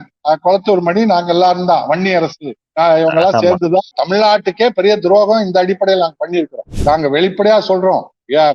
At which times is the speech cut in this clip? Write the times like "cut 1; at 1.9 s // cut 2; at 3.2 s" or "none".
cut 1; at 4.0 s // cut 2; at 6.7 s